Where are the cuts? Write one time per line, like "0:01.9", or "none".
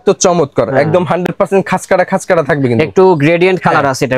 none